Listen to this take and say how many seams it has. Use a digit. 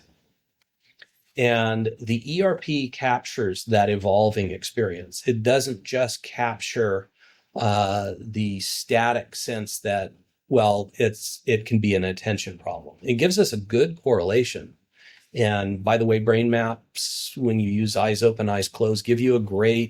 0